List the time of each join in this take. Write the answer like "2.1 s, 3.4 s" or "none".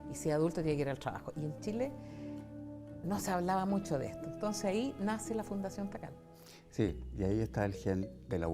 none